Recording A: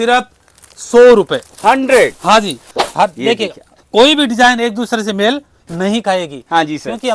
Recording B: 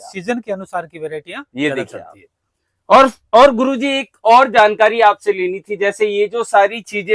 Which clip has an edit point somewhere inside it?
A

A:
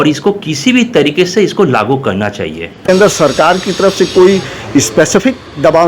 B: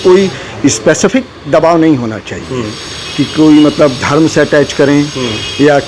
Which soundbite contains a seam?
A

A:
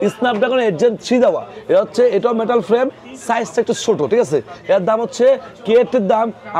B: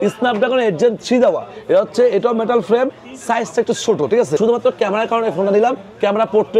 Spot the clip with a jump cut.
B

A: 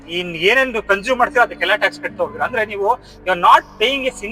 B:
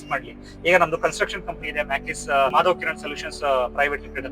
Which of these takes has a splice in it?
B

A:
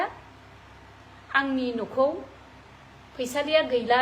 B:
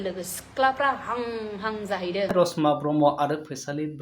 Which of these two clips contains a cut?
B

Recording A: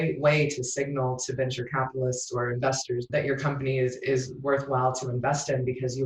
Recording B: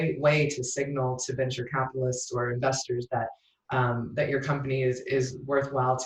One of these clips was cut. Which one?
A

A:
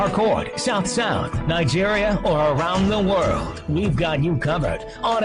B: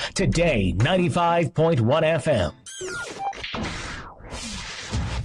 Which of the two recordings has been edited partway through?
B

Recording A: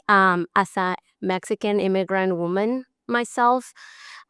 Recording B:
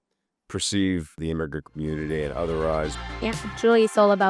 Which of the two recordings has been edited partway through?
B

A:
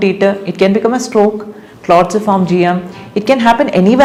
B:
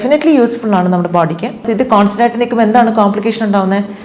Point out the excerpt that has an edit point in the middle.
B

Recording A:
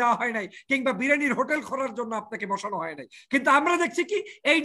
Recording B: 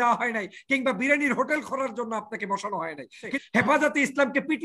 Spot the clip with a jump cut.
B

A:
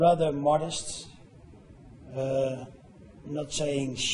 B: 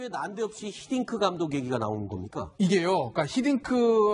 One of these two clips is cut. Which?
A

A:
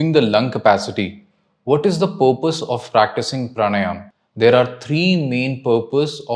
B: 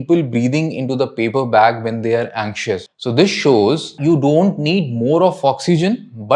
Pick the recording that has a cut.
B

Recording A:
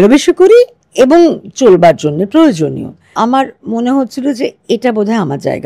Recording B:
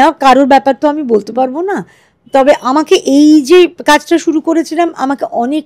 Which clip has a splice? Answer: A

